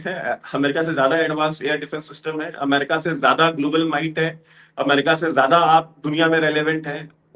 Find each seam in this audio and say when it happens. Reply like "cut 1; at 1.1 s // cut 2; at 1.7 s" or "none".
none